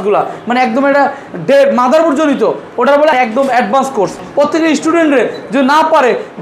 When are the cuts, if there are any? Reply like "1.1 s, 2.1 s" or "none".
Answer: 3.1 s, 4.2 s